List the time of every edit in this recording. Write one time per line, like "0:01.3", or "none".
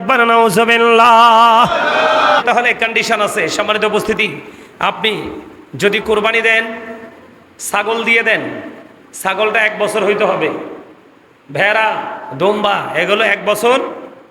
0:02.4